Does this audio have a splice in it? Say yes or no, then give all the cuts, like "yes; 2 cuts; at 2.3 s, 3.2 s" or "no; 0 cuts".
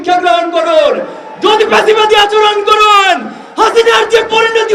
no; 0 cuts